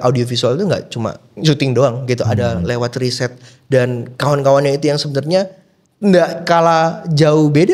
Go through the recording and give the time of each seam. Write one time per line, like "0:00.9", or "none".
none